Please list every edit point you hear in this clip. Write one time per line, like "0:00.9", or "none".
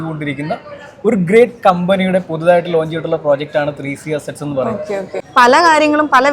0:05.2